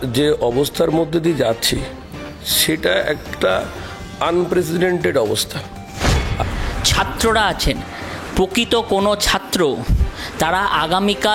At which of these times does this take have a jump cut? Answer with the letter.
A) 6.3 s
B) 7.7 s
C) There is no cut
A